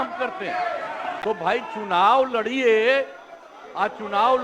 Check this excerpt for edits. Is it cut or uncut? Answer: cut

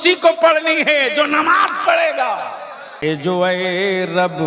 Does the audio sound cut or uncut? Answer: cut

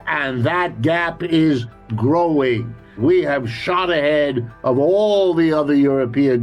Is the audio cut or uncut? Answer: cut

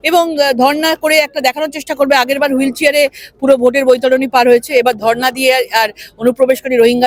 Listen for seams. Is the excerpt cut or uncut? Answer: uncut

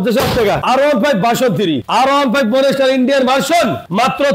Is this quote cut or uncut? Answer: cut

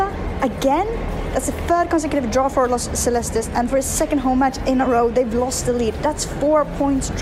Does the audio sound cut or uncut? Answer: uncut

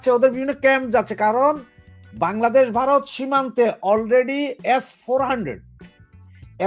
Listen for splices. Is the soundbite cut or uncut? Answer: uncut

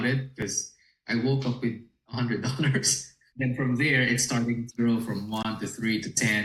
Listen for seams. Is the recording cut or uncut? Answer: uncut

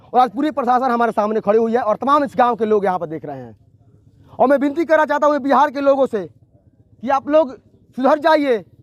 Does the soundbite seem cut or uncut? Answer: uncut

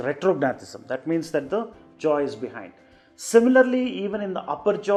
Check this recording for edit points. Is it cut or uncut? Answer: uncut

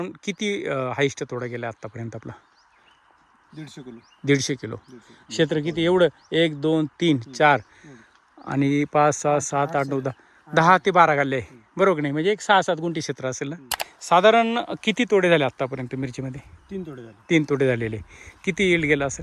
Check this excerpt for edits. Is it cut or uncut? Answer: cut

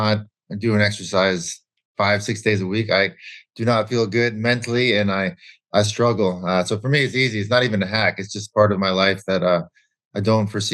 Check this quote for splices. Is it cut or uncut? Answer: uncut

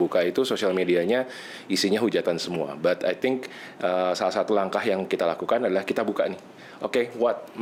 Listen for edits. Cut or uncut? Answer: uncut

